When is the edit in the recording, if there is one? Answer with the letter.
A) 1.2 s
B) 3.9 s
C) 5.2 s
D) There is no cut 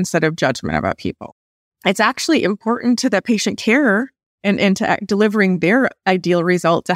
A